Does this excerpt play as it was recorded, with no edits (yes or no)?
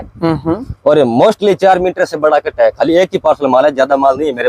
yes